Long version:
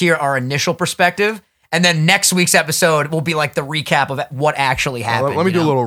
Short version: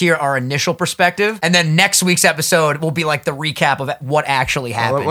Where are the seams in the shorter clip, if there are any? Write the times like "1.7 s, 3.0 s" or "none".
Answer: 1.4 s